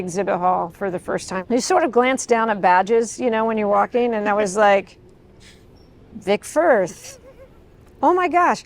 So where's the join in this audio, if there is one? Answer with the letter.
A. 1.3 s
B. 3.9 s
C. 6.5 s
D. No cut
A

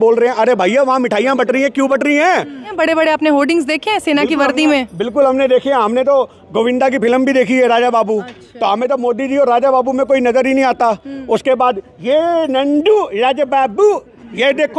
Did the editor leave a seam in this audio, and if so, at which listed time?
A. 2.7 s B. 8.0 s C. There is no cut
A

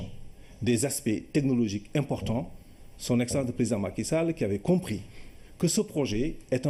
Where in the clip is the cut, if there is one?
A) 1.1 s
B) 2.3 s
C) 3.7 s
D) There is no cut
C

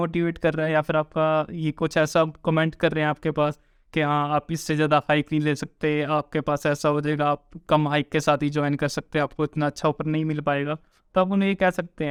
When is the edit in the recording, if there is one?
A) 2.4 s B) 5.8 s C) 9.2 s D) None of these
D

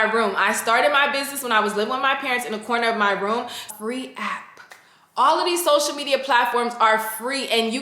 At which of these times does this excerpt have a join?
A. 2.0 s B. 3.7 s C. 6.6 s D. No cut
B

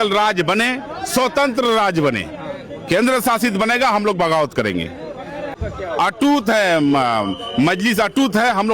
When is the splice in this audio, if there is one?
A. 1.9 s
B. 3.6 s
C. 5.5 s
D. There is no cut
C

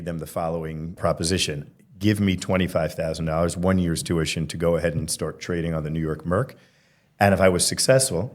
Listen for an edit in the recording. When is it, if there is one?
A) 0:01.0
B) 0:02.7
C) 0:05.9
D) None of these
A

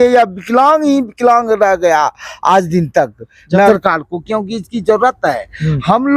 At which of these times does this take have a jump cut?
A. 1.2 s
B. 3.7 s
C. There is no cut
B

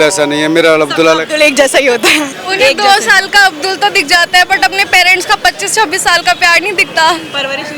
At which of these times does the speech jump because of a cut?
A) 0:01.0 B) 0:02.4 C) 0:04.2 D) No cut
B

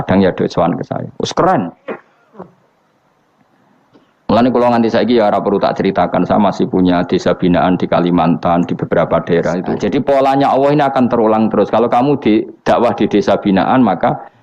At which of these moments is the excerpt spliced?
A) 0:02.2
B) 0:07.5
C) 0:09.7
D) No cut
C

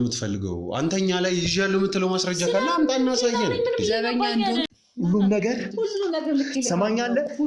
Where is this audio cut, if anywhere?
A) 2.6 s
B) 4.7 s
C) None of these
B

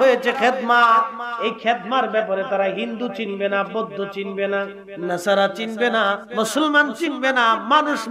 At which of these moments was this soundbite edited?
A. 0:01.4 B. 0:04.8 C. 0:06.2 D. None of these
C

